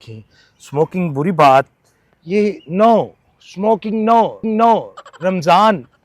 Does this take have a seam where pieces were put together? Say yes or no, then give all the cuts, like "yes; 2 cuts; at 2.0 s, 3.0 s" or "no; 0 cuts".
no; 0 cuts